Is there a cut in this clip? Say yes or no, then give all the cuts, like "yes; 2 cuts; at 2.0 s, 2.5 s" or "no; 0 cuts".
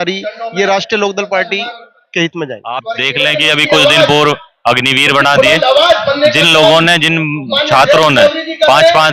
yes; 1 cut; at 3.0 s